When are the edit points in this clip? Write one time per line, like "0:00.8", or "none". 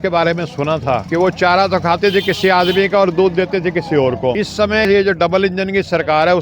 0:01.0
0:04.9